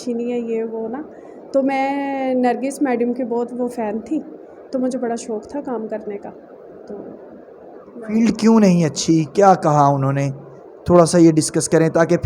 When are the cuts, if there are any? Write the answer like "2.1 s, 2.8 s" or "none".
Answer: none